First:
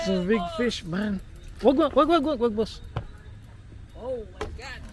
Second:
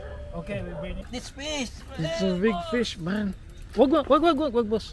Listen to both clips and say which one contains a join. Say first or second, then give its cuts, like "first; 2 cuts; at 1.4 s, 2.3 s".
second; 1 cut; at 1.1 s